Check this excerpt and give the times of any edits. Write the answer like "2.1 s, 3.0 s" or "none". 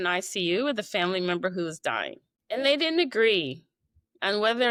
none